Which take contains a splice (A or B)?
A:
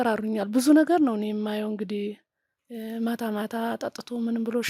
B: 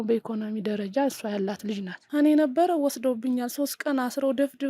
B